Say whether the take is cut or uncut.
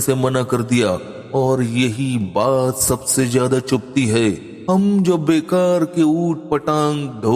cut